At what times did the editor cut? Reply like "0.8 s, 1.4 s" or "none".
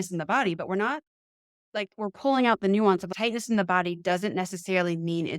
3.1 s